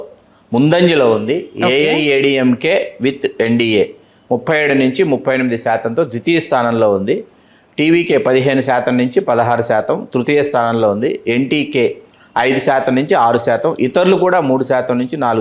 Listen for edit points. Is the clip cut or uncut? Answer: uncut